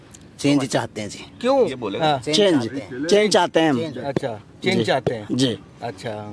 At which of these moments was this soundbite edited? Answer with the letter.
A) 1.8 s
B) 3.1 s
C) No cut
A